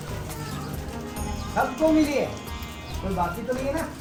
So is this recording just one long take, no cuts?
yes; 0 cuts

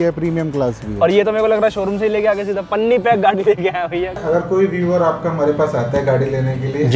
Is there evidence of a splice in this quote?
yes; 1 cut; at 4.2 s

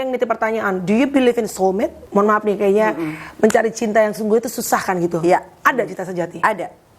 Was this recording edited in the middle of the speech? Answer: yes; 1 cut; at 2.0 s

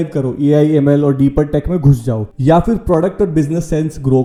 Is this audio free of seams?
yes; 0 cuts

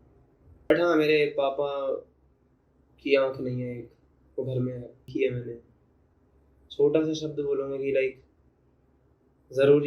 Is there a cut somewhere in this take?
yes; 2 cuts; at 0.7 s, 5.0 s

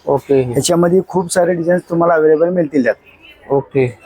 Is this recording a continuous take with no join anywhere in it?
yes; 0 cuts

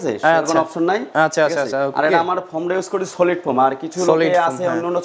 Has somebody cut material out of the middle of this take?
no; 0 cuts

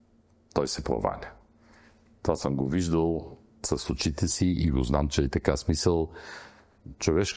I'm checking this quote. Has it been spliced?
no; 0 cuts

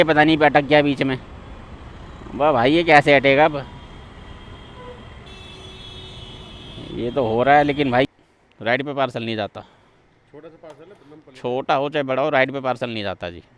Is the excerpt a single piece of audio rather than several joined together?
no; 1 cut; at 8.2 s

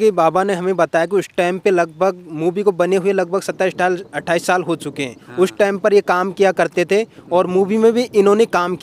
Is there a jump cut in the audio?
no; 0 cuts

